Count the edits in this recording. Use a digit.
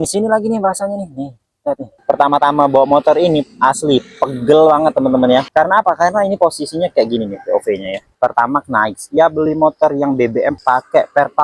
2